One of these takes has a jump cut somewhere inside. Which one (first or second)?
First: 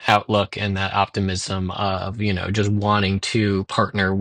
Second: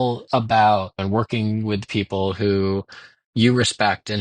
second